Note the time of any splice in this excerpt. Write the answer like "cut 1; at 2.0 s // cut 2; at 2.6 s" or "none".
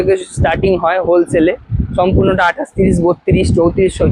none